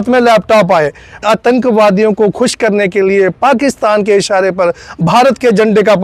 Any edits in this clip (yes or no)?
yes